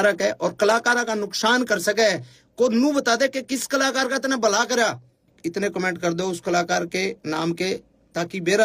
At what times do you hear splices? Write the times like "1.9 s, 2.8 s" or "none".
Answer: 5.3 s